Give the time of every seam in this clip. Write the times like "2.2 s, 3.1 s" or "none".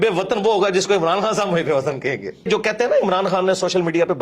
2.5 s